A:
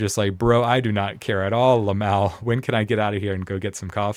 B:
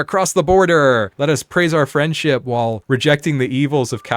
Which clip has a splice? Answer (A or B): B